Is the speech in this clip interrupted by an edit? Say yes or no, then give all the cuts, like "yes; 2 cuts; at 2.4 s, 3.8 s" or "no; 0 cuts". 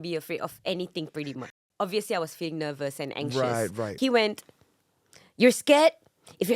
yes; 2 cuts; at 1.4 s, 3.9 s